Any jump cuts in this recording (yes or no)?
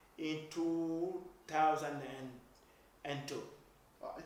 no